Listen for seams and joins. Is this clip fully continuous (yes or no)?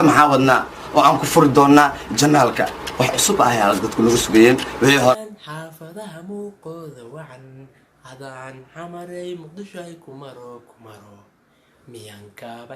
no